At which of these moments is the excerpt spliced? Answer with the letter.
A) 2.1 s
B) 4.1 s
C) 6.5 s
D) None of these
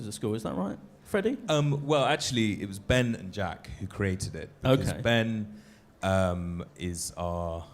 D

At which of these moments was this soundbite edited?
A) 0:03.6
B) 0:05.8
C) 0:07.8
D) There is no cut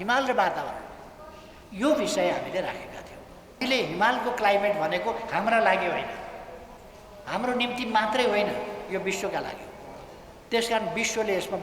A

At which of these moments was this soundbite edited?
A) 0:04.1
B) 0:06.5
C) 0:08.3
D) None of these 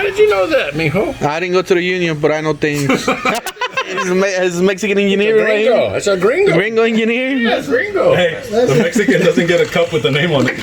A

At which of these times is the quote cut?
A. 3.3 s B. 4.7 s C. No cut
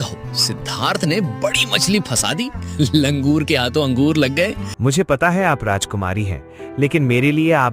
B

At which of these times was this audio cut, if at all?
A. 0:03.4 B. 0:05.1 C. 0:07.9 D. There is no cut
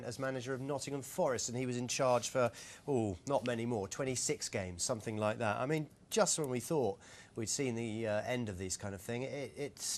D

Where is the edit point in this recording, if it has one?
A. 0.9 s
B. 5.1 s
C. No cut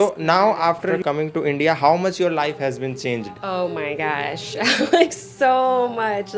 A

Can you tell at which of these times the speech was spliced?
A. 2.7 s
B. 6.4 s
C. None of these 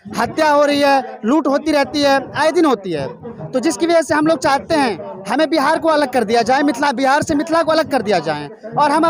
C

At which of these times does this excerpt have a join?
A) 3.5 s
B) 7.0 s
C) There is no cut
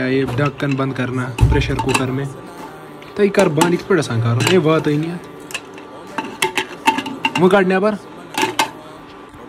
C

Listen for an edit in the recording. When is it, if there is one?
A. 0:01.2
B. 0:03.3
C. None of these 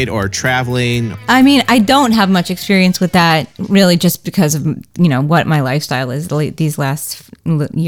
A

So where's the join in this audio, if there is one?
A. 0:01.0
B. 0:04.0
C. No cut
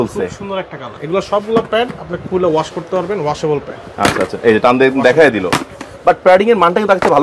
A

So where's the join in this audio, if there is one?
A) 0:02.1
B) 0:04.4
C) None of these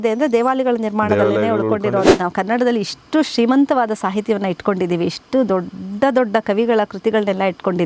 A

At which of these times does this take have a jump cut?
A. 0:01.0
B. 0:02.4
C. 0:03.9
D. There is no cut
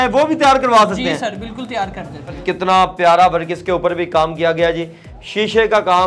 B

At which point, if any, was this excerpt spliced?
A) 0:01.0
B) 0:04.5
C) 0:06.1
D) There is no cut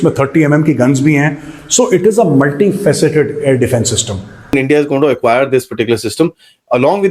B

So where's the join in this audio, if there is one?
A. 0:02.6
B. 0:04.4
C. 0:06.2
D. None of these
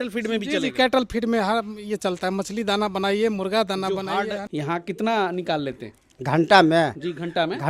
B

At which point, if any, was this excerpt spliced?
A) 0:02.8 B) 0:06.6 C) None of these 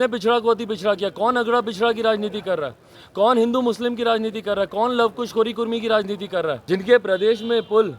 B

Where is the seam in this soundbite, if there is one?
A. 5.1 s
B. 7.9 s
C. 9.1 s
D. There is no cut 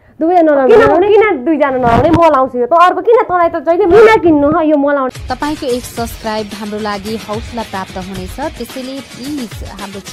A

